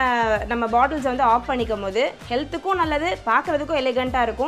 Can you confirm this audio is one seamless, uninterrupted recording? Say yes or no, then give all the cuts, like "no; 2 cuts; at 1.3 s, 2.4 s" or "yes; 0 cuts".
yes; 0 cuts